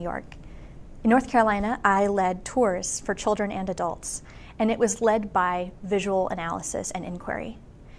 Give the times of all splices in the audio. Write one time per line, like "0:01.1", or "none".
0:01.8